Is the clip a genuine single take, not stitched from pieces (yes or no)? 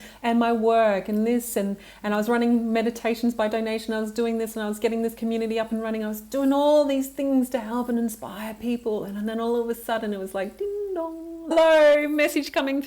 no